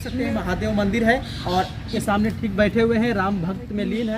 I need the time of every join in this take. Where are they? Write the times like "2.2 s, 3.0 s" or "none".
2.0 s